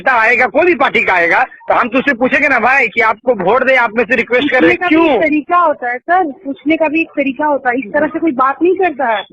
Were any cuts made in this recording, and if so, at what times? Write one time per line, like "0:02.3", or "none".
0:06.4